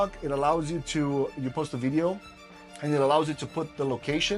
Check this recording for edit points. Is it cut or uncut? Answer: uncut